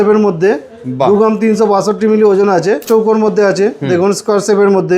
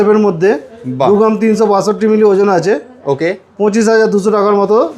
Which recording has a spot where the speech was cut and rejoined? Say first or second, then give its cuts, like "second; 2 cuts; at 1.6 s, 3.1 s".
first; 1 cut; at 2.9 s